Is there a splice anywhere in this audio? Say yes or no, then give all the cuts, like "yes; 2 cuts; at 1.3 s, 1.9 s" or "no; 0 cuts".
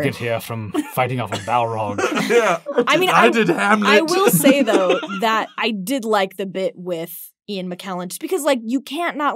yes; 2 cuts; at 2.6 s, 5.5 s